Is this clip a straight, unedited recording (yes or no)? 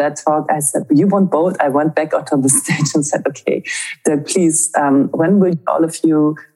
no